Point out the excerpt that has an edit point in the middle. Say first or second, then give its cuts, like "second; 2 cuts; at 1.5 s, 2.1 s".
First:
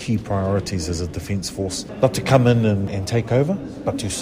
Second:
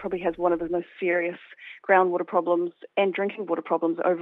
first; 2 cuts; at 1.8 s, 2.9 s